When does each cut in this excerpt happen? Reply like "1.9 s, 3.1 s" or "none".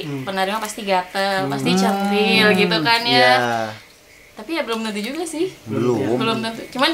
none